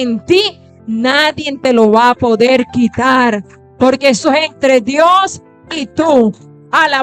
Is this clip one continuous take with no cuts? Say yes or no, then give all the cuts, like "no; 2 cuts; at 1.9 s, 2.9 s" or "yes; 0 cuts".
yes; 0 cuts